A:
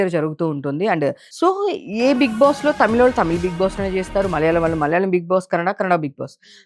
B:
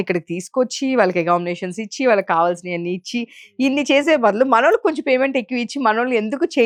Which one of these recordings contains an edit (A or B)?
A